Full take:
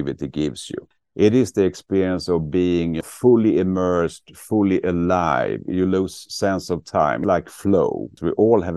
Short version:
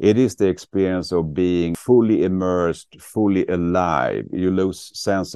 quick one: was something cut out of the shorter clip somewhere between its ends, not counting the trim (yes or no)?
yes